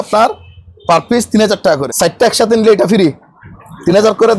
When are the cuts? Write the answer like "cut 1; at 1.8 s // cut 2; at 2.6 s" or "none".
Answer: cut 1; at 1.9 s